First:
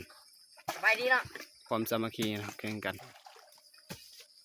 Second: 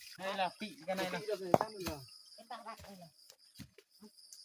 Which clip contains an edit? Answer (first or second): first